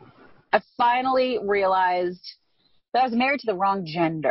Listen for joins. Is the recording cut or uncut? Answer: cut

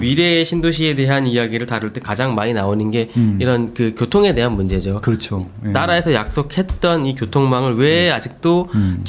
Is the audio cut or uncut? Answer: uncut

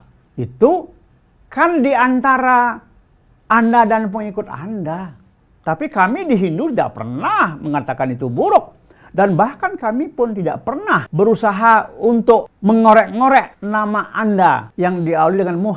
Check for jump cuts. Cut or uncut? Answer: cut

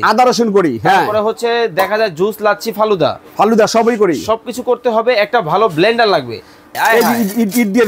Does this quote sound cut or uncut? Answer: cut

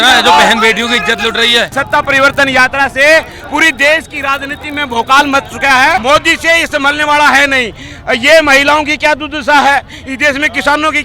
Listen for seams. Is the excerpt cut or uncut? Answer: cut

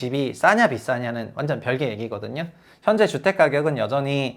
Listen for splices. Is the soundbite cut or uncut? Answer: uncut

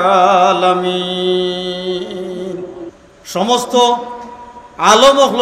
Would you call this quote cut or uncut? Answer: uncut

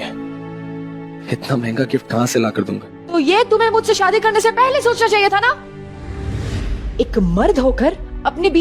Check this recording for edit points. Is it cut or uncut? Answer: uncut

